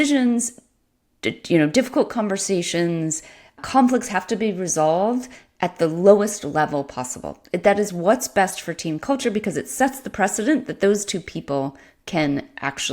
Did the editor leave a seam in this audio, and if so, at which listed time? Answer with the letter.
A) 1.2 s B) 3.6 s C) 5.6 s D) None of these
B